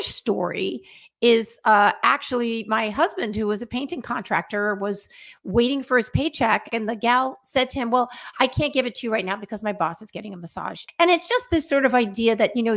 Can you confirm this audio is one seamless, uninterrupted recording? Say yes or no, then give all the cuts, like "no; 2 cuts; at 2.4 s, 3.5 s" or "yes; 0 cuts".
no; 2 cuts; at 6.7 s, 10.8 s